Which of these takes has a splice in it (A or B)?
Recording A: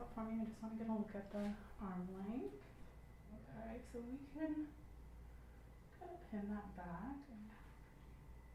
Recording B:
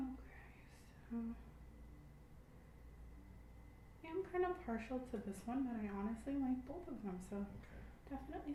A